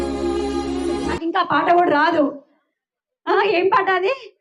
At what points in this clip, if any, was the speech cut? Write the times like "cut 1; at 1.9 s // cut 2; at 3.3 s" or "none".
cut 1; at 1.2 s

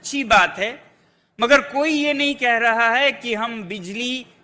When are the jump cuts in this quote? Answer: none

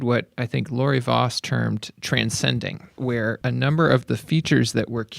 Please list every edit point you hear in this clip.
cut 1; at 1.9 s // cut 2; at 3.3 s

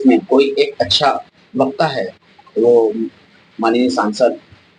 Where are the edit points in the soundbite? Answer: none

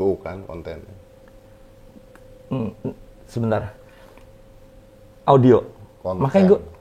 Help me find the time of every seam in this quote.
none

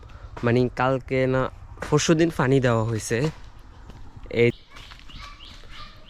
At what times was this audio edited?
cut 1; at 4.5 s

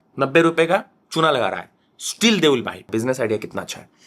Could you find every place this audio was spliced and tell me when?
cut 1; at 2.9 s

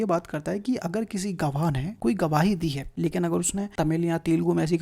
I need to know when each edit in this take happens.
cut 1; at 1.9 s // cut 2; at 2.9 s // cut 3; at 3.7 s

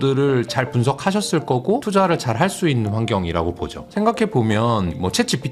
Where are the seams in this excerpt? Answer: cut 1; at 1.8 s

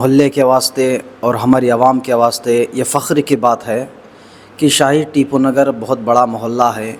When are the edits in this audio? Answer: none

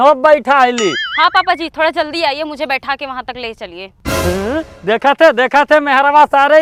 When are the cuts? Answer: none

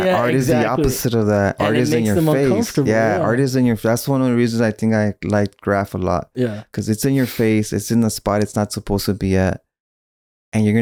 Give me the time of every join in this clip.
none

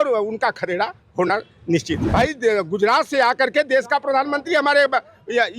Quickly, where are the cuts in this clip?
cut 1; at 2.0 s

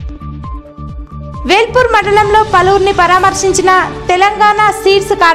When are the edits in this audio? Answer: cut 1; at 1.0 s

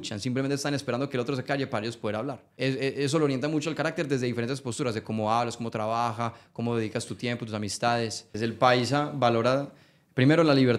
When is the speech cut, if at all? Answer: cut 1; at 2.4 s // cut 2; at 8.3 s

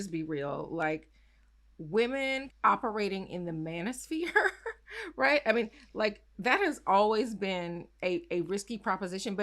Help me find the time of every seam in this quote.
cut 1; at 2.5 s

